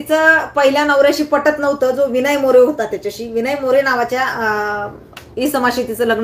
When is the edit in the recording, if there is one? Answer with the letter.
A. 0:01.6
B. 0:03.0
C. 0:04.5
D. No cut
D